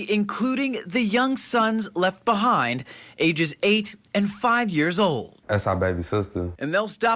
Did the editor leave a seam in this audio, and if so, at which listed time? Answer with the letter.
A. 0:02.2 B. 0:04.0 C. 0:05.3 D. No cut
C